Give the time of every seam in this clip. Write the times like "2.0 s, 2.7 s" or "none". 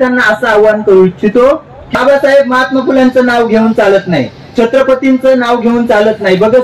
1.9 s